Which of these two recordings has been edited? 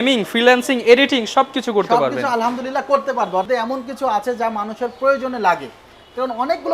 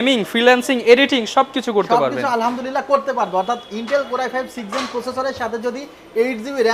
first; 1 cut; at 3.5 s

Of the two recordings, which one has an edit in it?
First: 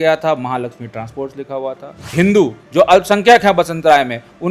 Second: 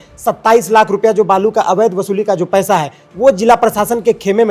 first; 1 cut; at 2.1 s

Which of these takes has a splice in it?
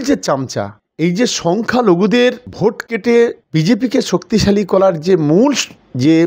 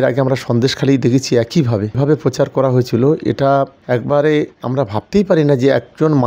second; 1 cut; at 2.0 s

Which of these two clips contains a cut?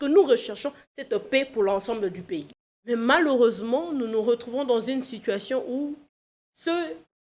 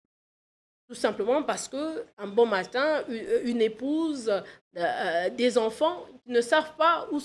first; 1 cut; at 2.5 s

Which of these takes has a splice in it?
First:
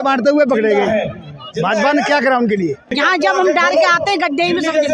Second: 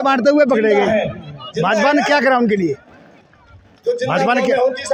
first; 1 cut; at 2.8 s

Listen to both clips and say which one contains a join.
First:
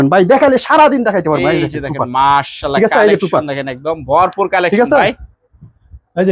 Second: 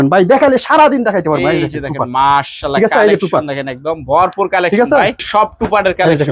second; 1 cut; at 5.3 s

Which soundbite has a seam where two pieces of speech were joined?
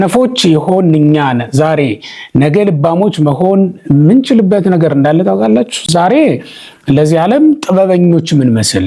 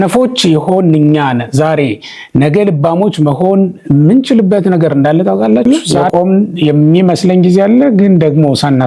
second; 1 cut; at 5.6 s

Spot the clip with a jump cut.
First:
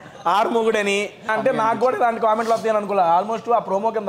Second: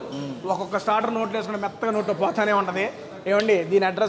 first; 1 cut; at 1.3 s

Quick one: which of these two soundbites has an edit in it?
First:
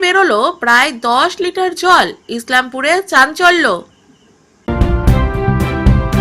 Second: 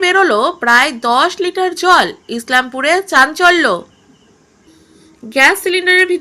first; 1 cut; at 4.7 s

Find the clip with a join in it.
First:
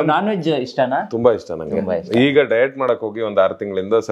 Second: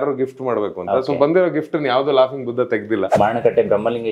second; 1 cut; at 3.1 s

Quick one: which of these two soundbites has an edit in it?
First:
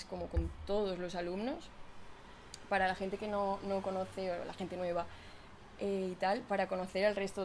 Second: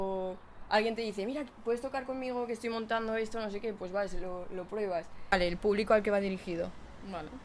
second; 1 cut; at 5.3 s

